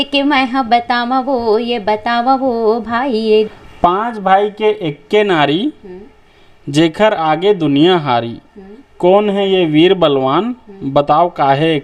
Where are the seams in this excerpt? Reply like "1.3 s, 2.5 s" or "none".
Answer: 3.5 s